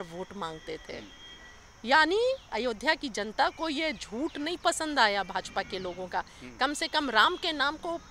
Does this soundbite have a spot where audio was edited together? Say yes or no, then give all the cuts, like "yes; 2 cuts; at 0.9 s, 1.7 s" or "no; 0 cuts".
no; 0 cuts